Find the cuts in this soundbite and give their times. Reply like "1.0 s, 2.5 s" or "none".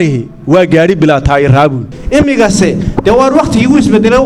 1.9 s